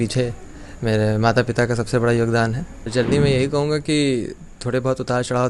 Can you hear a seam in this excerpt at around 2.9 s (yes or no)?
yes